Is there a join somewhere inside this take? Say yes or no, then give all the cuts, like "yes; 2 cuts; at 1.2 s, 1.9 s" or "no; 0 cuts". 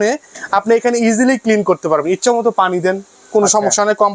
no; 0 cuts